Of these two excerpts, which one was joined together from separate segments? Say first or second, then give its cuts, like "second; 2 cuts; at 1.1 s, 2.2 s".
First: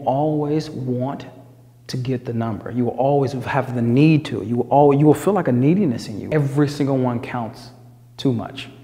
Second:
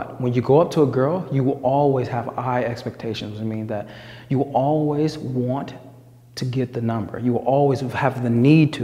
first; 1 cut; at 6.1 s